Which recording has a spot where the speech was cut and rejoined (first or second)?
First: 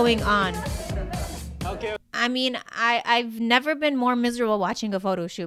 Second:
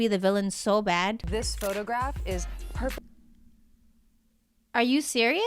second